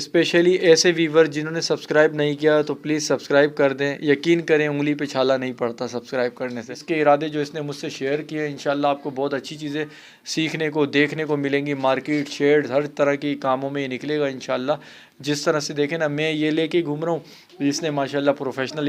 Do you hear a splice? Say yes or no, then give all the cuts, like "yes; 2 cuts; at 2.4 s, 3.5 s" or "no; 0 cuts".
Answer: yes; 1 cut; at 6.8 s